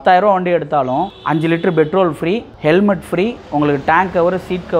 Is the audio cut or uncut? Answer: uncut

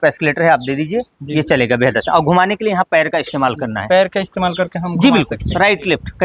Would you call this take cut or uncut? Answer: uncut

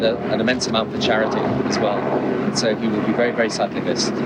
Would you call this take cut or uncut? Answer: uncut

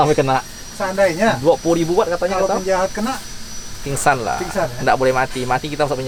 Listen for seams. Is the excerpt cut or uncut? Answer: uncut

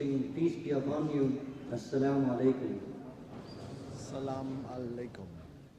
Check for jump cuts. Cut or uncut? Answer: uncut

